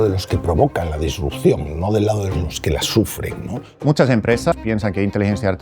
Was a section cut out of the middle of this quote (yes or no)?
yes